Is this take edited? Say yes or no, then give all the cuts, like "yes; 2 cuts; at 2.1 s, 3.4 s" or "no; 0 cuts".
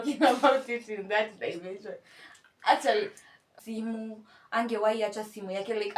yes; 1 cut; at 3.6 s